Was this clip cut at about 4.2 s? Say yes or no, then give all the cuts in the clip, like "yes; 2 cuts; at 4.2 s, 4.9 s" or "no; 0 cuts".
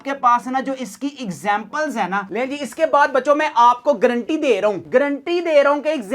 no; 1 cut; at 2.3 s